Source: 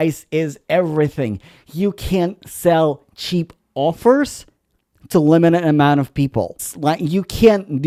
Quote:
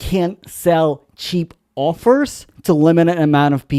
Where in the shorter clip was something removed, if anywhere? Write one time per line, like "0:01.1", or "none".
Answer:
0:02.5